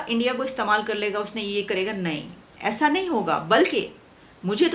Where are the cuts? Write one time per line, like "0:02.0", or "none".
none